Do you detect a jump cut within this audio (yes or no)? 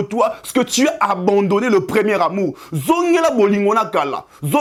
no